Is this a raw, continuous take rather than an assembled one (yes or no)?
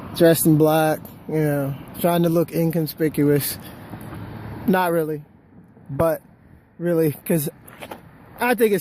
no